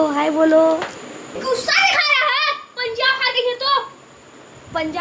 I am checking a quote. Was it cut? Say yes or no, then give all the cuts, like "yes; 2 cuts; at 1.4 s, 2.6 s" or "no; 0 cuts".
yes; 1 cut; at 1.4 s